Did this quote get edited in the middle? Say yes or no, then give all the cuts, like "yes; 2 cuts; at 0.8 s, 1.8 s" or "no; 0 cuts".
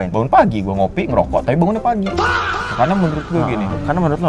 yes; 1 cut; at 2.6 s